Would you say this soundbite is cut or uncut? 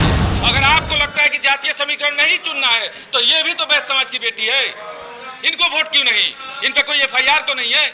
uncut